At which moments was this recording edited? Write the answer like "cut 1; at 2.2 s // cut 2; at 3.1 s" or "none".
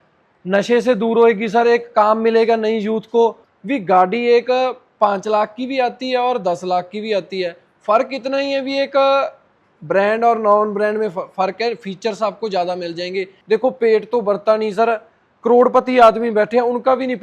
cut 1; at 3.5 s // cut 2; at 13.3 s